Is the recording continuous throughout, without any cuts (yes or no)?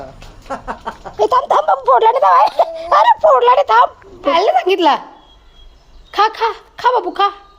no